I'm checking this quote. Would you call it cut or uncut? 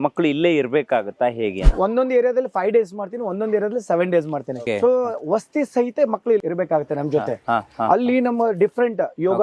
cut